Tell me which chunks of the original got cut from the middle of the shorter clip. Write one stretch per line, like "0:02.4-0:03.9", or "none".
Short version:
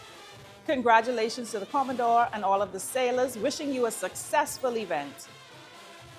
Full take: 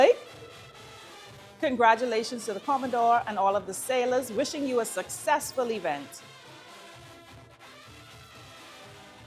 none